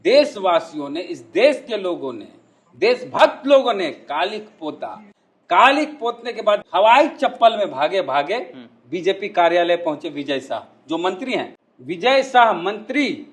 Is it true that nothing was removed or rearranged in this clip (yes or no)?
no